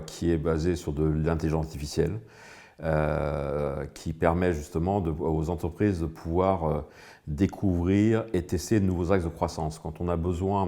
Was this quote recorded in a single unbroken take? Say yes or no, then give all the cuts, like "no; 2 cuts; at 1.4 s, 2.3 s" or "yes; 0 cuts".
yes; 0 cuts